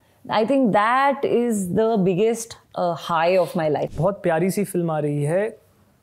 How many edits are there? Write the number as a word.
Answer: one